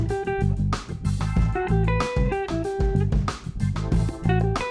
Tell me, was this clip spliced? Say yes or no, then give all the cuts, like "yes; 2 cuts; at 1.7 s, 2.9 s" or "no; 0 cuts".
no; 0 cuts